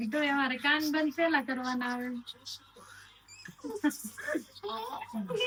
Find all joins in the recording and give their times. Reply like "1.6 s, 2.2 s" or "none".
none

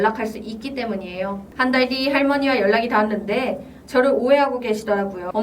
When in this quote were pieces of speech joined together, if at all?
1.5 s

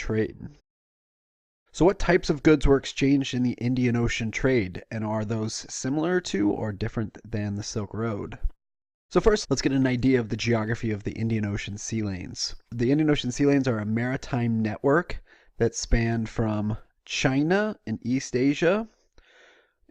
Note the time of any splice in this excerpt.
13.4 s

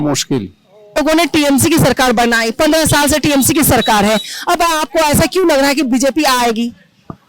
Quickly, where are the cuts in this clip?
0.9 s

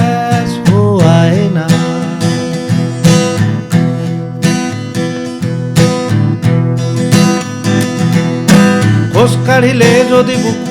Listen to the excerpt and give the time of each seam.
none

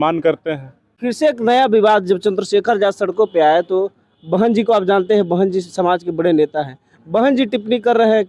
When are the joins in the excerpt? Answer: 0.9 s

